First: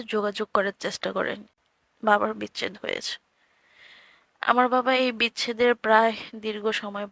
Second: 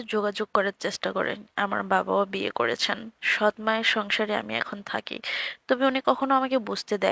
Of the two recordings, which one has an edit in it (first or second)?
first